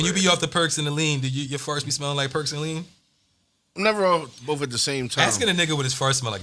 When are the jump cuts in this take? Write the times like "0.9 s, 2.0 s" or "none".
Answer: none